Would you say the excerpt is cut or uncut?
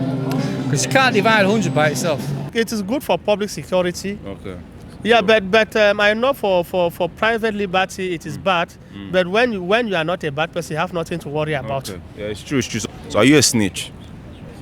cut